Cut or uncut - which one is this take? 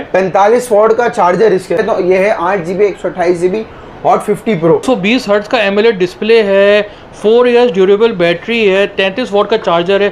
cut